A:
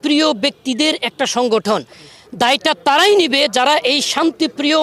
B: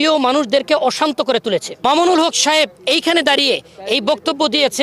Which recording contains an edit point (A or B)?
B